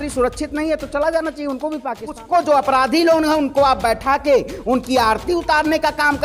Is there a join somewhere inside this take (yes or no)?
yes